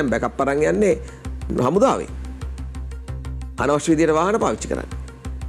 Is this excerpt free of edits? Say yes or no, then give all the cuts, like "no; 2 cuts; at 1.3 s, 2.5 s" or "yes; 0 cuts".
yes; 0 cuts